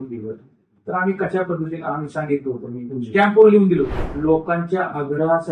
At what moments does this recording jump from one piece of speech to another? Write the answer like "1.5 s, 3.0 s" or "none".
4.0 s